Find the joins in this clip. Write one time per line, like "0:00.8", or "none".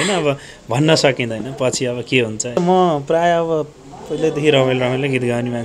0:02.6